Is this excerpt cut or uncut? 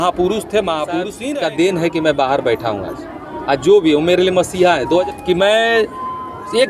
cut